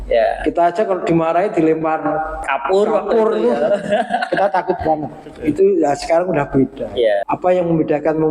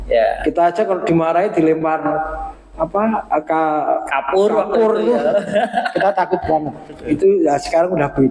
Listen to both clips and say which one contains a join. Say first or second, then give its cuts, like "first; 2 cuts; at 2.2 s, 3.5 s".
first; 2 cuts; at 2.5 s, 7.2 s